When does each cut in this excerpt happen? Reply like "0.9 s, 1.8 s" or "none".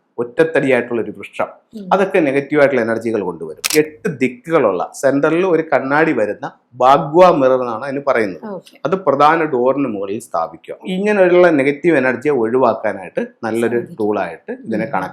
3.7 s, 10.8 s

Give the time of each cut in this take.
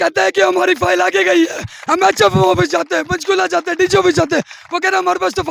none

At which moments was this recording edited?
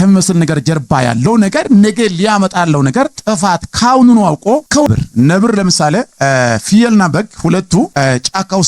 4.9 s

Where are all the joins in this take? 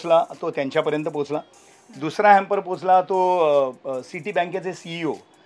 none

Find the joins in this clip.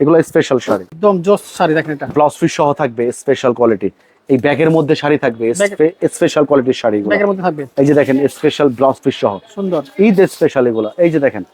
0.9 s

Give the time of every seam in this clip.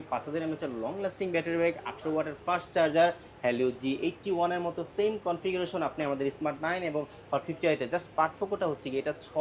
none

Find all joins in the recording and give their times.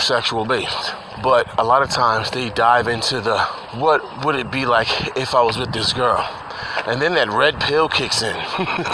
1.0 s, 3.6 s

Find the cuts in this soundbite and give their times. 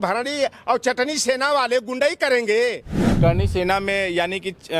2.9 s

